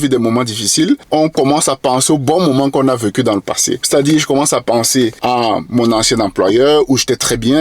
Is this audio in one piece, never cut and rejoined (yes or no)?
no